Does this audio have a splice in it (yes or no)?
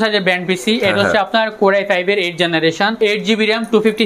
yes